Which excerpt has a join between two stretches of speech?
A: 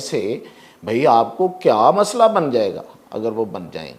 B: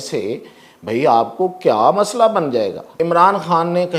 B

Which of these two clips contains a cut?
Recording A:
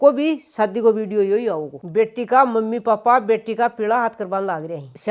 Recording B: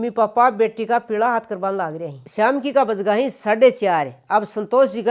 A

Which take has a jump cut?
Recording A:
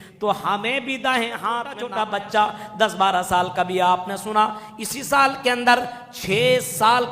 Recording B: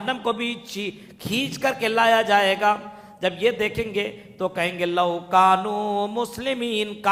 A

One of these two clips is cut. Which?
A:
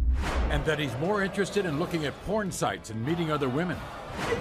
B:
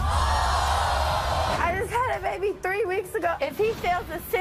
B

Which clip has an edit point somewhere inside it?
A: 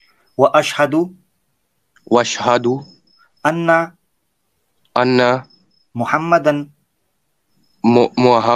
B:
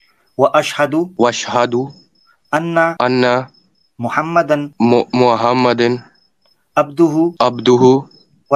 B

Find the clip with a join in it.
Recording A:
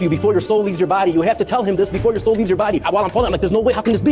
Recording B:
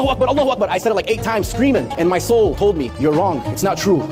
A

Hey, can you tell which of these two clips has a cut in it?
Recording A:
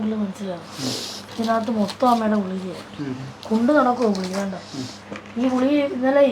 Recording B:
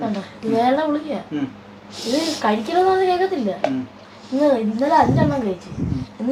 A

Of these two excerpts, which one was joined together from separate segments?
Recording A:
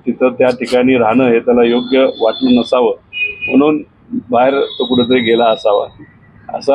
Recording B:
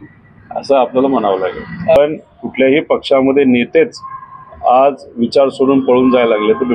B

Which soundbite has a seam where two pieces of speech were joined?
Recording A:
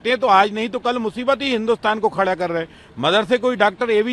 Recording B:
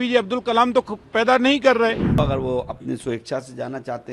B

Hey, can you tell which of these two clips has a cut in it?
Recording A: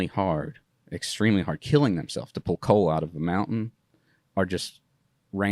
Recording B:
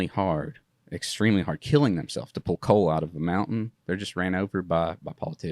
B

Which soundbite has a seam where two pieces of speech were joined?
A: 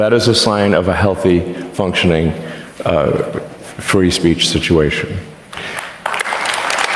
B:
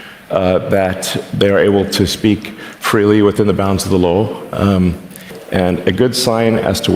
B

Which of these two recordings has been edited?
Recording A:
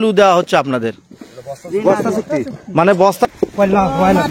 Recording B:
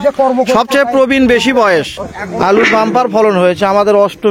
A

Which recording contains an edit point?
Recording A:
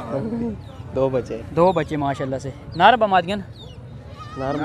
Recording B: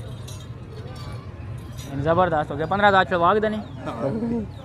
B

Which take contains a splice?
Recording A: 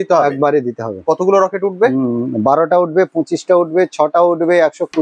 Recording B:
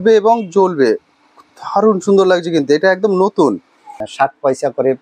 B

